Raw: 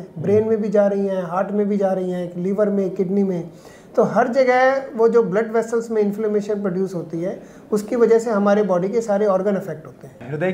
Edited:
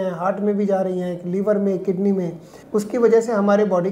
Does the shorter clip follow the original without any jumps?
no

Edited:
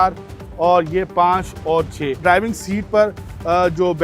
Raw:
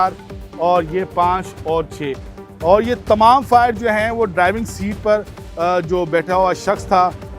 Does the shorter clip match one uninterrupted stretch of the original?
no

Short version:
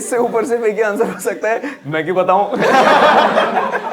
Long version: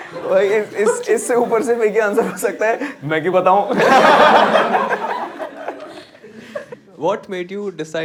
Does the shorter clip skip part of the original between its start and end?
no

